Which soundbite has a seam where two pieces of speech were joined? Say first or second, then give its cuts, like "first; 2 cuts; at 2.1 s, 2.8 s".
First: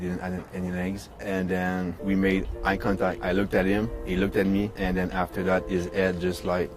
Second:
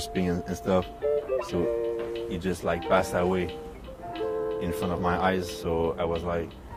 first; 4 cuts; at 1.1 s, 2.0 s, 3.2 s, 4.7 s